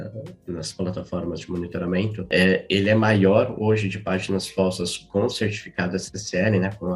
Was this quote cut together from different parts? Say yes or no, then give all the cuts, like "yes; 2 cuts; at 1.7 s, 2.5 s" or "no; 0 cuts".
yes; 1 cut; at 2.2 s